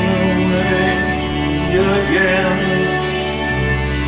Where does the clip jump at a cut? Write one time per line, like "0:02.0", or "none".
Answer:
none